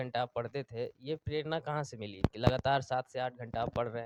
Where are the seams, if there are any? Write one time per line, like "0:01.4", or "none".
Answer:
none